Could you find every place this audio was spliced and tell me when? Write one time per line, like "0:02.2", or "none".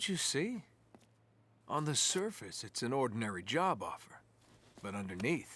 none